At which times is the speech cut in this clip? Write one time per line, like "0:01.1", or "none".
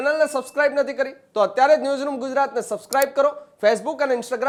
none